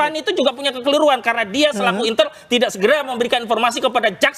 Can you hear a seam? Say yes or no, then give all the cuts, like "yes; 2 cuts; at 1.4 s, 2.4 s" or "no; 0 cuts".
no; 0 cuts